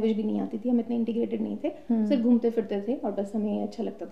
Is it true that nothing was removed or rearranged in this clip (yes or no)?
yes